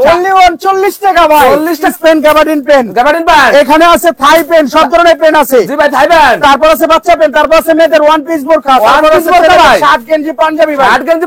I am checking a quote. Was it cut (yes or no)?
yes